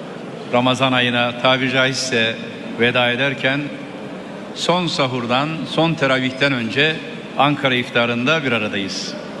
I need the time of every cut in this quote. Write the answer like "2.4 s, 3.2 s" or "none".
3.7 s